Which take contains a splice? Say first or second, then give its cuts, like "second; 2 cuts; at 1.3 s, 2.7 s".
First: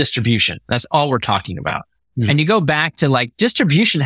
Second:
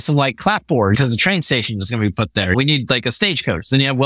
second; 2 cuts; at 0.9 s, 2.5 s